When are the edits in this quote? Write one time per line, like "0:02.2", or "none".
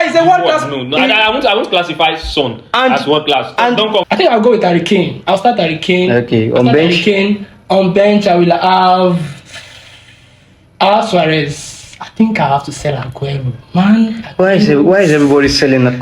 0:04.1